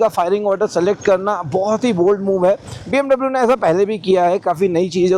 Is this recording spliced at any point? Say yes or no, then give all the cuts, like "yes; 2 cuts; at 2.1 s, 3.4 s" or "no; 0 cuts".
no; 0 cuts